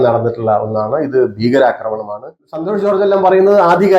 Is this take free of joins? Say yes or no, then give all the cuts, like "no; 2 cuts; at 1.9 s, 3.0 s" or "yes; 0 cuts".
no; 1 cut; at 2.4 s